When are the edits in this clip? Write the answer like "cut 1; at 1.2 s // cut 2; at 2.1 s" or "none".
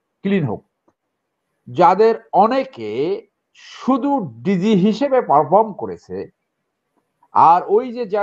cut 1; at 1.0 s